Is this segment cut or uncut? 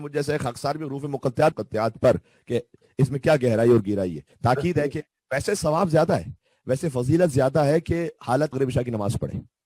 cut